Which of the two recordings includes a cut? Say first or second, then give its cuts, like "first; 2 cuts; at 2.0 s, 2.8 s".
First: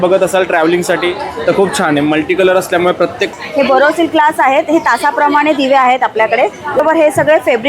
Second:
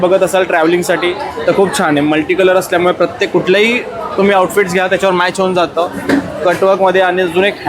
first; 2 cuts; at 3.3 s, 6.8 s